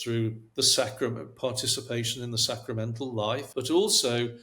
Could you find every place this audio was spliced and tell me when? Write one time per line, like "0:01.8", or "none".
0:03.5